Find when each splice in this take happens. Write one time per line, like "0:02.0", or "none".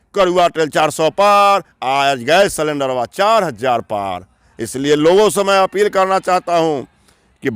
none